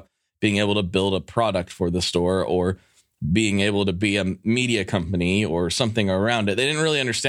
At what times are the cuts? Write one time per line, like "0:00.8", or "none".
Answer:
none

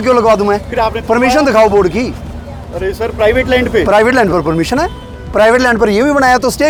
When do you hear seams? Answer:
none

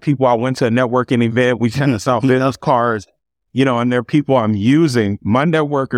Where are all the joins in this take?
none

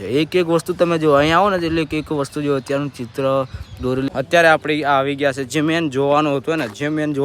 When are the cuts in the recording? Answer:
0:04.1

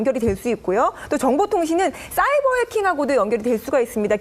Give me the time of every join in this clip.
0:02.0

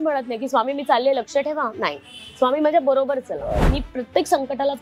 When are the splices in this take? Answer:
0:03.6

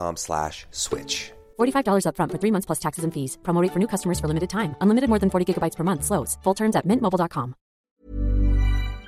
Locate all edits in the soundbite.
0:07.9

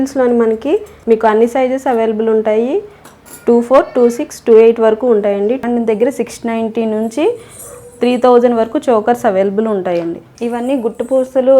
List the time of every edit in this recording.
0:00.9
0:05.6
0:10.2

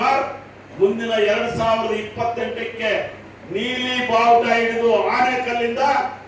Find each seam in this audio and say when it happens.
none

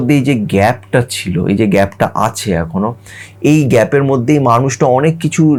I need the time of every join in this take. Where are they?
none

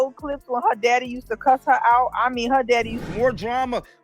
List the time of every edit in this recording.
0:03.0

